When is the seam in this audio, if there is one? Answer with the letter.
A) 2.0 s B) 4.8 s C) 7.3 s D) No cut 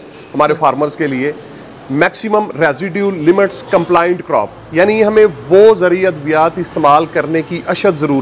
D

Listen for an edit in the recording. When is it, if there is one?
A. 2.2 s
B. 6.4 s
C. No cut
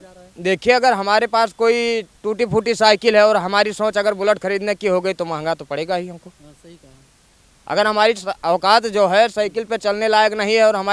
C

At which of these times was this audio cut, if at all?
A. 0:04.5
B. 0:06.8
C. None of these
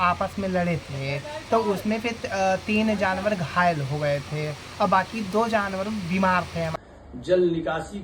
B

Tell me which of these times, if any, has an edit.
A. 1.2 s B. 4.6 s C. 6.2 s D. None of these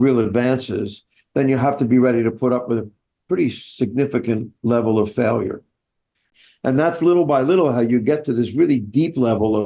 C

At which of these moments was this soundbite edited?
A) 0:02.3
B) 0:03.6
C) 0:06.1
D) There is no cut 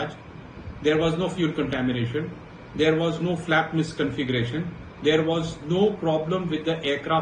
D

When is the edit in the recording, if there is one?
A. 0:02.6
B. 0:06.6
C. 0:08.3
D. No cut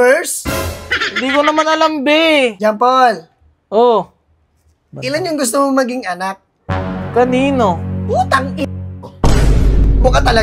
A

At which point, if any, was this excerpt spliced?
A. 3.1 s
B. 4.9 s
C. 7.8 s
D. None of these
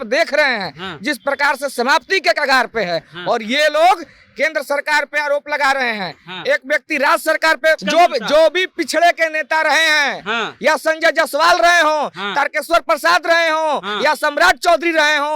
C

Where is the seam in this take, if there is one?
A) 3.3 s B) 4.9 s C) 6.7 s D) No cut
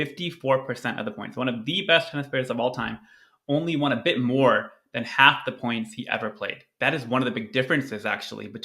C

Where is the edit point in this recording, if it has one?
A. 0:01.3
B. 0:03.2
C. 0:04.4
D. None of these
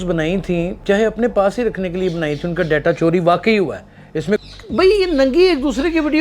C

